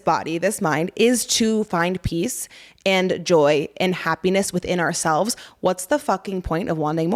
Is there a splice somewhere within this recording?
no; 0 cuts

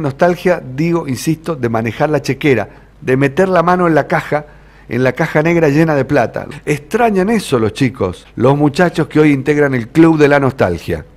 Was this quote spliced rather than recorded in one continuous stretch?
yes; 2 cuts; at 6.4 s, 8.2 s

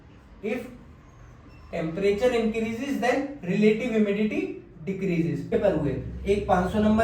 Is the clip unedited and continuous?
no; 1 cut; at 5.5 s

